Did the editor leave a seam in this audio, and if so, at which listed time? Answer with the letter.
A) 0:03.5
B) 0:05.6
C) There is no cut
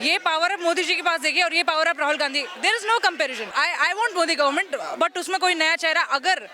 A